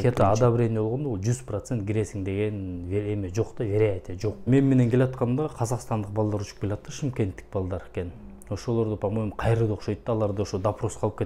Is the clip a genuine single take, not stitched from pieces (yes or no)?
no